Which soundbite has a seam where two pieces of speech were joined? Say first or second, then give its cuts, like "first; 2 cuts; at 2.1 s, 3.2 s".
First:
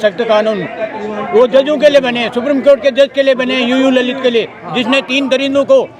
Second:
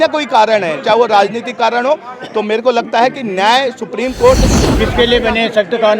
second; 1 cut; at 4.6 s